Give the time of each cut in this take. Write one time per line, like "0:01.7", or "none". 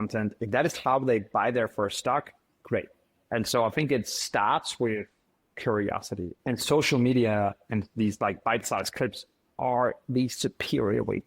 0:03.1
0:06.3